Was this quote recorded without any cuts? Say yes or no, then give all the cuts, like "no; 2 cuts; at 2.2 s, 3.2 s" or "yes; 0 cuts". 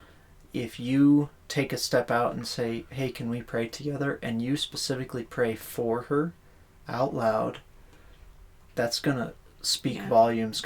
yes; 0 cuts